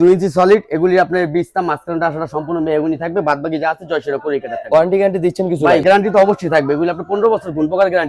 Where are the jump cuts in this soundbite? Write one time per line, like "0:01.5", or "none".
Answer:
none